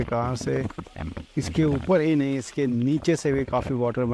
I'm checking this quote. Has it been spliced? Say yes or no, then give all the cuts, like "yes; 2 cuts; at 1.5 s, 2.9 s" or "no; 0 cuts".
no; 0 cuts